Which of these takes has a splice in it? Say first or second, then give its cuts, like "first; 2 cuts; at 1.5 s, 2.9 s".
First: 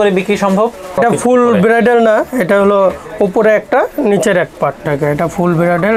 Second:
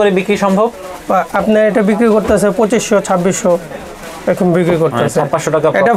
first; 2 cuts; at 1.0 s, 4.8 s